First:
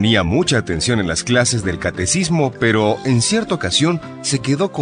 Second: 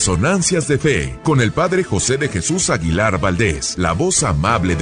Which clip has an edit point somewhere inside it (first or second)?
second